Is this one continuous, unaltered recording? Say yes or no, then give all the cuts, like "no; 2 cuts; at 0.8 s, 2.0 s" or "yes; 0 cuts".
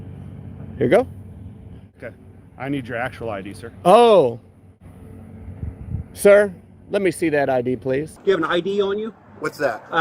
no; 3 cuts; at 1.9 s, 4.8 s, 8.1 s